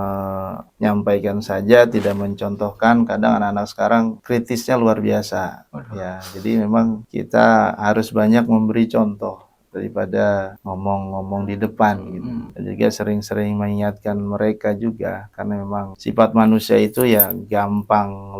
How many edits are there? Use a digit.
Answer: 0